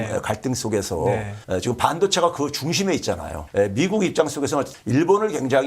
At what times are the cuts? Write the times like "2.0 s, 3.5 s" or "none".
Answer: 1.3 s, 3.3 s, 4.7 s

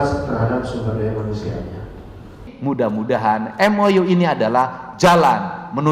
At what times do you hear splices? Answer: 2.4 s

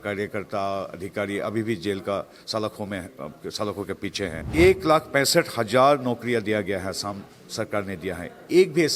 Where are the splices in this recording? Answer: 4.4 s

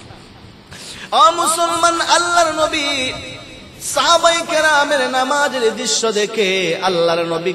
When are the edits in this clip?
none

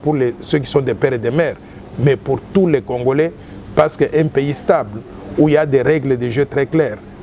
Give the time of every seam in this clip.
none

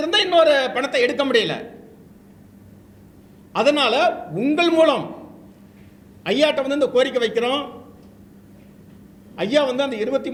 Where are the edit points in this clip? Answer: none

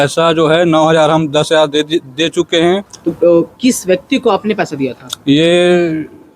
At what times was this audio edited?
3.0 s

